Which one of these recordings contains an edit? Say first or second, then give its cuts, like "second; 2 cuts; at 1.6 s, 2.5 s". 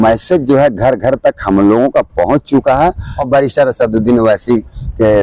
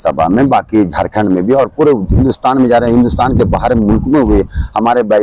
first; 1 cut; at 3.1 s